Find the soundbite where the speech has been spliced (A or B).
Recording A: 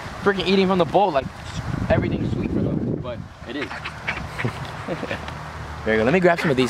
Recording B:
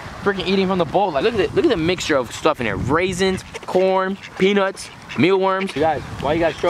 B